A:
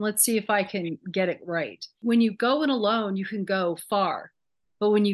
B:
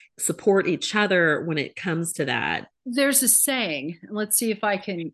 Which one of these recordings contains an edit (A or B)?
B